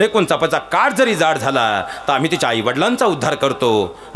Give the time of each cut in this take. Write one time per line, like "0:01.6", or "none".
none